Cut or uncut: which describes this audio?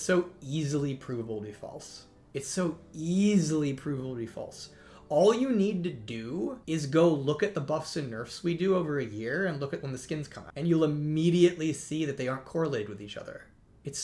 cut